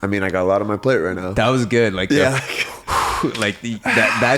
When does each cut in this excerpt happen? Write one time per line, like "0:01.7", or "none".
none